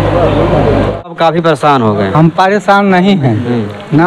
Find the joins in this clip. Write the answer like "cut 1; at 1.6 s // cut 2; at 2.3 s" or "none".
cut 1; at 1.0 s